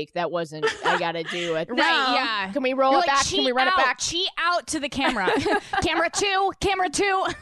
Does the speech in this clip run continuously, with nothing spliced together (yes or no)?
yes